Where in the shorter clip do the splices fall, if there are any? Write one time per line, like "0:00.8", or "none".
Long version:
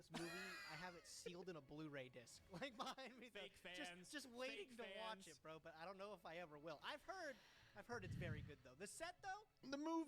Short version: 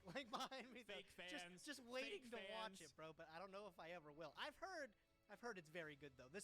none